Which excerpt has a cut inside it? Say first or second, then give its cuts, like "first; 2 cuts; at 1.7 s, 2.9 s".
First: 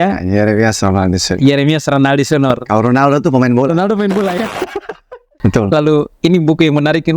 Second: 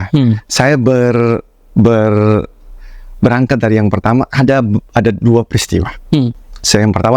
first; 1 cut; at 5.2 s